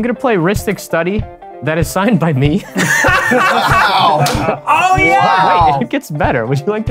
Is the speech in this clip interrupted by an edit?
yes; 1 cut; at 5.8 s

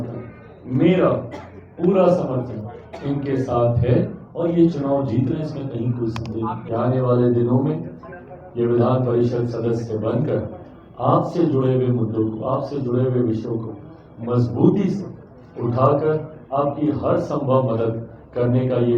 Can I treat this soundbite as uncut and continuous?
no; 1 cut; at 6.6 s

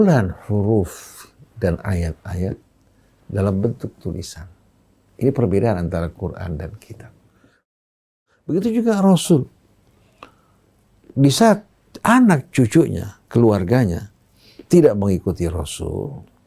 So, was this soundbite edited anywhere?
yes; 1 cut; at 7.8 s

